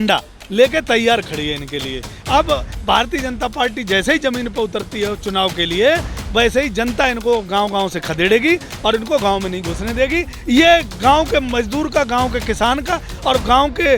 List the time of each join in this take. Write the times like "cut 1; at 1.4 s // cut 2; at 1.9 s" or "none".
none